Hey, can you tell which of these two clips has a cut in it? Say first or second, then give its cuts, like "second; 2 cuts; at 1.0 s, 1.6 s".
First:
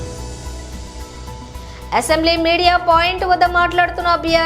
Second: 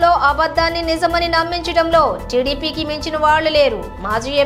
first; 1 cut; at 1.0 s